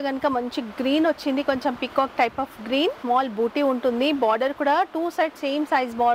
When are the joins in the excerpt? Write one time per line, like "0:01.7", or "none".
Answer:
0:03.0